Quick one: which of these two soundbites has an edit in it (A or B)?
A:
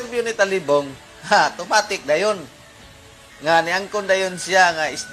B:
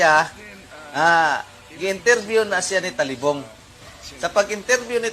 B